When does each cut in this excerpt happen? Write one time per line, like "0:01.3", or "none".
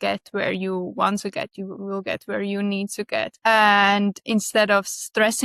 0:03.3